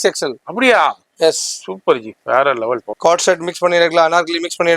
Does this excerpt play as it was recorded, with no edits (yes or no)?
no